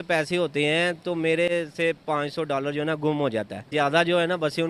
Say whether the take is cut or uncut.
cut